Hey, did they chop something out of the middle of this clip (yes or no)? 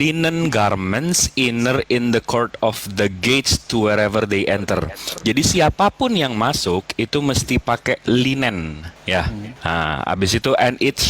yes